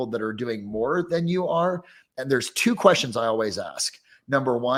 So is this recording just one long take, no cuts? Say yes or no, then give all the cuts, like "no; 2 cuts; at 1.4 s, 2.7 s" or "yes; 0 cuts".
yes; 0 cuts